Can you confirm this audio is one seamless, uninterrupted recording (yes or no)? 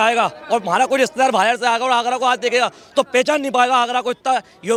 yes